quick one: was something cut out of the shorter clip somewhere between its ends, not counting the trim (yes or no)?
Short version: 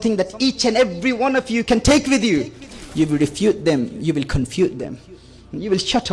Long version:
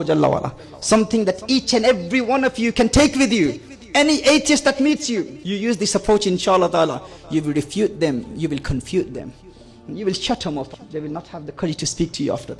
yes